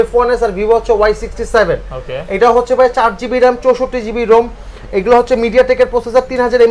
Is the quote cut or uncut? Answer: uncut